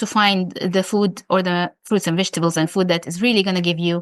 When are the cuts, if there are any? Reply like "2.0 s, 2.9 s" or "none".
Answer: 1.8 s